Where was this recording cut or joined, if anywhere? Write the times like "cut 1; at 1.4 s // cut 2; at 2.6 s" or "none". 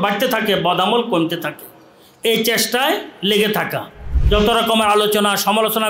cut 1; at 4.1 s